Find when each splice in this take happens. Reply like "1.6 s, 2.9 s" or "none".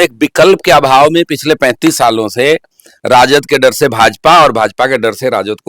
none